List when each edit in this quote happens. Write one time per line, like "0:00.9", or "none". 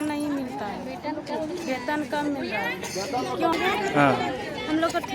0:03.5